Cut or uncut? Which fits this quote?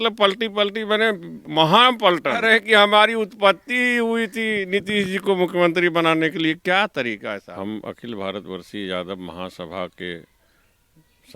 cut